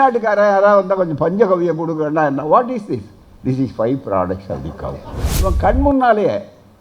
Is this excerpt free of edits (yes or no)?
no